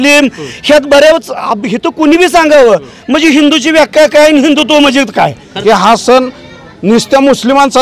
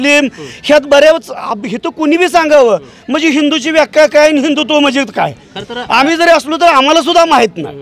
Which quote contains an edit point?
first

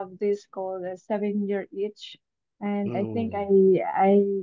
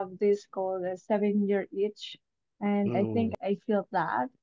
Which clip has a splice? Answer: second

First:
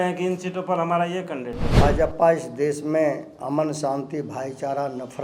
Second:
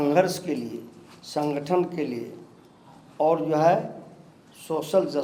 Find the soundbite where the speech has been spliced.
first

